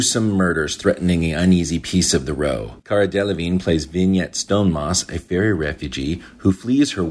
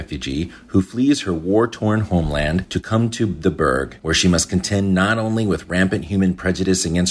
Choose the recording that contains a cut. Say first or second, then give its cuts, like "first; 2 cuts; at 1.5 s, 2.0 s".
second; 1 cut; at 3.9 s